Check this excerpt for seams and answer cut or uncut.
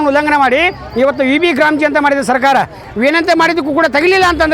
cut